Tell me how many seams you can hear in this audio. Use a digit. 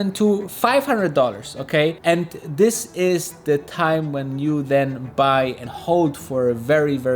1